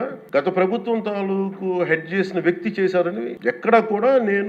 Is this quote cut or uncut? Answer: cut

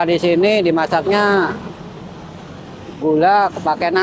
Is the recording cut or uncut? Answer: uncut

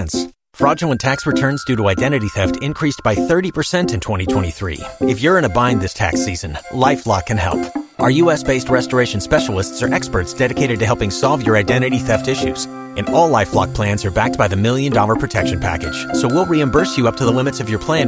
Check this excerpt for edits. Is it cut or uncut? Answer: uncut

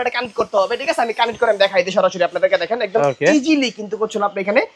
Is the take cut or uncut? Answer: uncut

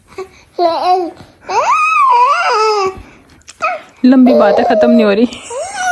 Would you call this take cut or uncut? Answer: uncut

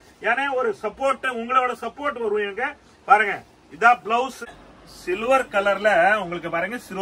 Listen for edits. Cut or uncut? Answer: cut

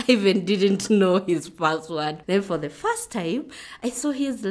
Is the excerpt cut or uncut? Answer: uncut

